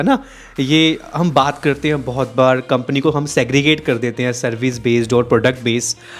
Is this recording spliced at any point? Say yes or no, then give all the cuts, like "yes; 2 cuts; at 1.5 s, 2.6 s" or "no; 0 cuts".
no; 0 cuts